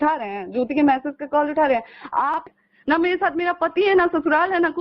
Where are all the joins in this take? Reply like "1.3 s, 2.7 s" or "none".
2.5 s